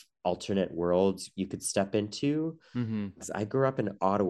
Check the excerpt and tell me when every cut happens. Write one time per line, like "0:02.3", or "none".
0:03.2